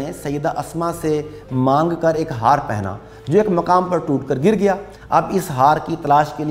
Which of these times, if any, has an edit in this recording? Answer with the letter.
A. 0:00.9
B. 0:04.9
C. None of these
B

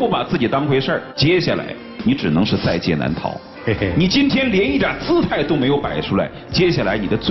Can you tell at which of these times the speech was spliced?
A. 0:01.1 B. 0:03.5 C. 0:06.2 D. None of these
A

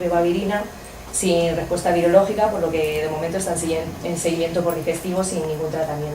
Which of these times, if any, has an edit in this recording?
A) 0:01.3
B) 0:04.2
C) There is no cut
B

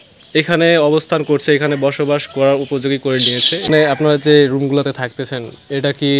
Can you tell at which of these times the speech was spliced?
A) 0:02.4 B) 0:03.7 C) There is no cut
B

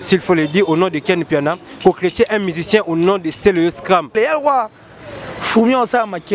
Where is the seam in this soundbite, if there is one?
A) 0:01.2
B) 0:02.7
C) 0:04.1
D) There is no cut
C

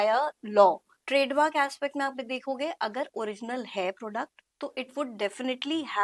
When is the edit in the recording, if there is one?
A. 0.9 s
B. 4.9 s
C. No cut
A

